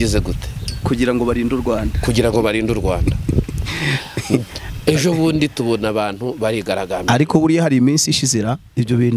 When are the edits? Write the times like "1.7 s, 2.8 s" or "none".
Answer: none